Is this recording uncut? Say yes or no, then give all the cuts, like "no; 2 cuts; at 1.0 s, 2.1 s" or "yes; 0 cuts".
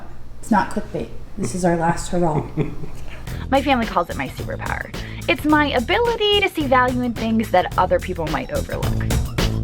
no; 1 cut; at 3.1 s